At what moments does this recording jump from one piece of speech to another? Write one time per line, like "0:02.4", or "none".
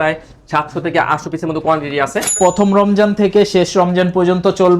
0:02.4